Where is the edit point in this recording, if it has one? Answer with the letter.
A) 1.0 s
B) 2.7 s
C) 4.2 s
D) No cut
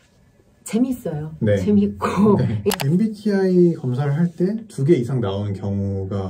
B